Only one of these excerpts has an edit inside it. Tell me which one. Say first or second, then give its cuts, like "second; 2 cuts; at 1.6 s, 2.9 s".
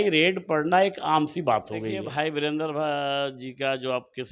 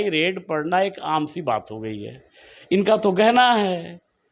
first; 1 cut; at 2.0 s